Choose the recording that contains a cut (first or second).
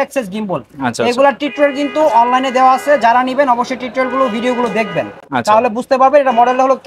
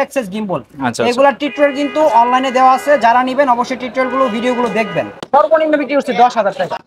second